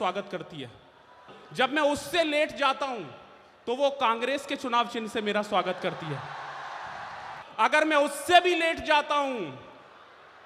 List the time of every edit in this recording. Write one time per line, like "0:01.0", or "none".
0:01.3
0:07.4